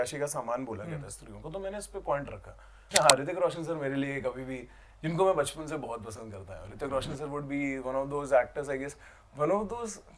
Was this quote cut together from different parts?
yes; 1 cut; at 2.9 s

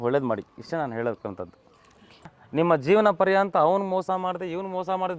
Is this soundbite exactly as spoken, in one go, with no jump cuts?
no; 1 cut; at 2.4 s

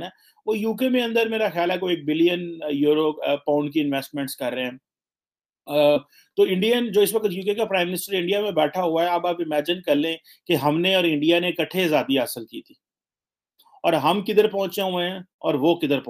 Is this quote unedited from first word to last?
yes; 0 cuts

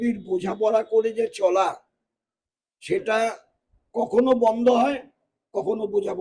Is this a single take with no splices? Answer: yes; 0 cuts

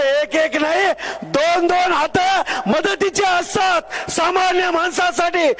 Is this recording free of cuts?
yes; 0 cuts

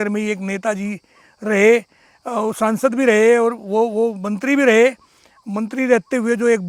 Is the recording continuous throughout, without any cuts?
yes; 0 cuts

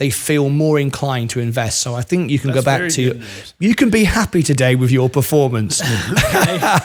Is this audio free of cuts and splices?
yes; 0 cuts

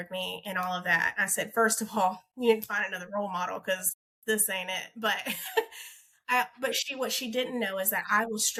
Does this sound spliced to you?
no; 0 cuts

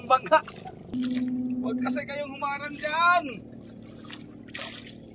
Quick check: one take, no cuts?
no; 1 cut; at 0.9 s

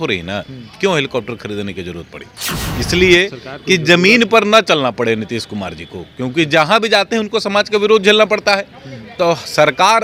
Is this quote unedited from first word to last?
yes; 0 cuts

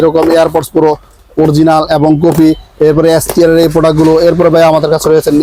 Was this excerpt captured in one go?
yes; 0 cuts

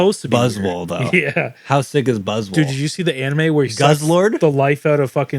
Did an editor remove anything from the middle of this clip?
no; 0 cuts

